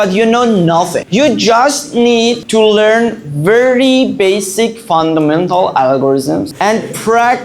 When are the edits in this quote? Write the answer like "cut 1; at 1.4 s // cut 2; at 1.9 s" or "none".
cut 1; at 1.0 s // cut 2; at 6.5 s